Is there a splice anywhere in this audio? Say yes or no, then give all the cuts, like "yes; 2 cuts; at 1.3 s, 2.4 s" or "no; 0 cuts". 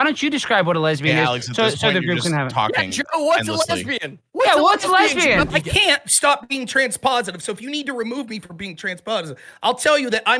yes; 1 cut; at 5.5 s